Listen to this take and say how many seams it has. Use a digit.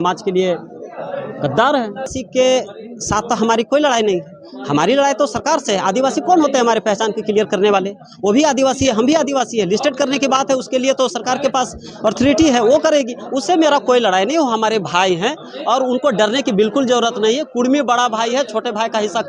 1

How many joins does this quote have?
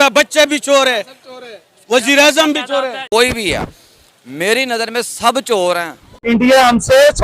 2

